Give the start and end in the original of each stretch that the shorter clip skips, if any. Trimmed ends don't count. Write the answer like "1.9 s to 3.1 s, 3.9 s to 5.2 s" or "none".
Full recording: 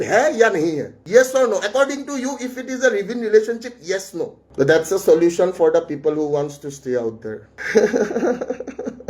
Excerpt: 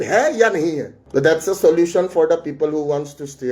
0.9 s to 4.4 s